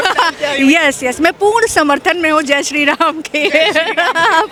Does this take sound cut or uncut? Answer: uncut